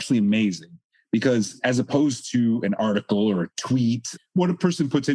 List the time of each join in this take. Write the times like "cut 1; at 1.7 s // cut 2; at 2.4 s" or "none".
cut 1; at 4.1 s